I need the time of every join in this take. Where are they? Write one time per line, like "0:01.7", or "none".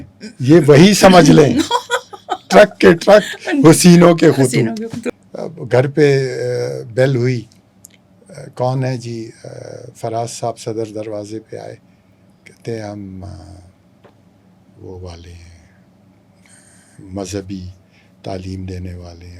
0:05.0